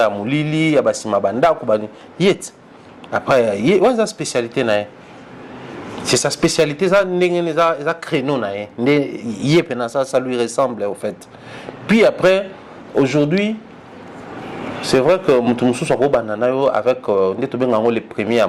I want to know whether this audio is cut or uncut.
uncut